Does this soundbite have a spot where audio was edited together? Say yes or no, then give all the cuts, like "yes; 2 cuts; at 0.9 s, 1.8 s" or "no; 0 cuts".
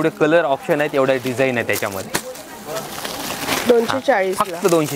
no; 0 cuts